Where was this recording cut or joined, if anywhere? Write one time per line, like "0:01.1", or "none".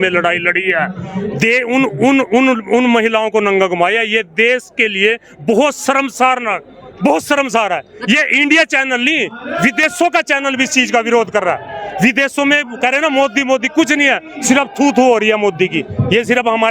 none